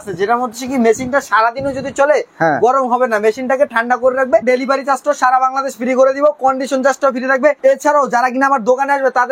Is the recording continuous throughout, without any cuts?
no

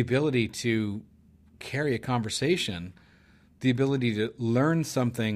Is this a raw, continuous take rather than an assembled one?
yes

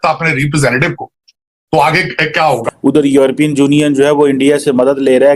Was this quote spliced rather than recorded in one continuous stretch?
yes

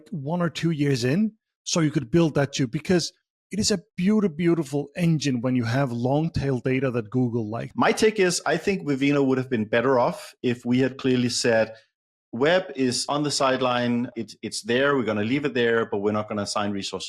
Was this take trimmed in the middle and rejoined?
yes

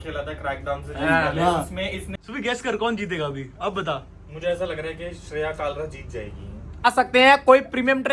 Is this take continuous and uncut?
no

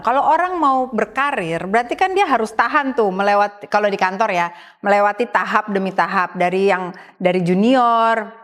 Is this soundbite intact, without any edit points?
yes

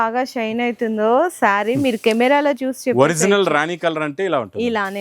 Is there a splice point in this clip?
no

